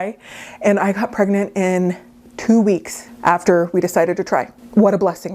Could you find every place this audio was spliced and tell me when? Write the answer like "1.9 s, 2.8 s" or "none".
none